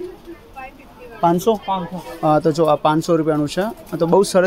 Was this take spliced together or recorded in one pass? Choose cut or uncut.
uncut